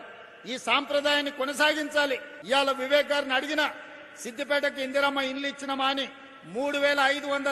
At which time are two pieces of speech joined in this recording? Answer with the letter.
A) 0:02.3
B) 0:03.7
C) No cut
A